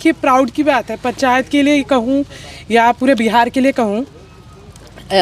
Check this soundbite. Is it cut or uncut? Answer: uncut